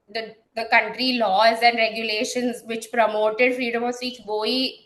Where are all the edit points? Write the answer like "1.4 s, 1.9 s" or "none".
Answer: none

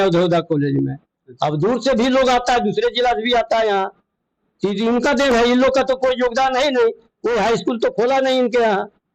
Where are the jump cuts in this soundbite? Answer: none

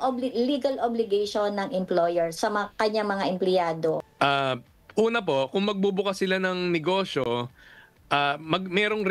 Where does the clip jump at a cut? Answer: 4.0 s

